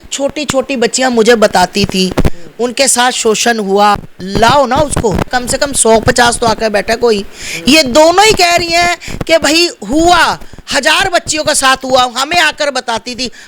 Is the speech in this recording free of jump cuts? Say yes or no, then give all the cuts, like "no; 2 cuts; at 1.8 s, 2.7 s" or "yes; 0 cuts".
no; 2 cuts; at 4.1 s, 5.3 s